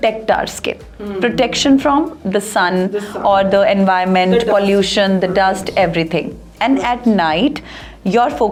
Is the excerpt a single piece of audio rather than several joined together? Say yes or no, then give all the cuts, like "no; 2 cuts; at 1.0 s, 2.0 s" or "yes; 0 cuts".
yes; 0 cuts